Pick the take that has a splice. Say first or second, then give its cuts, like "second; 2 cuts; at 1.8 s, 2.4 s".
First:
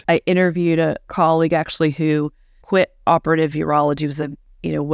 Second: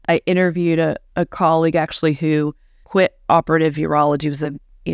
first; 1 cut; at 1.1 s